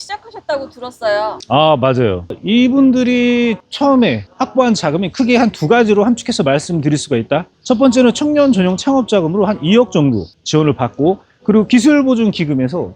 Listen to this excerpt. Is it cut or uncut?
uncut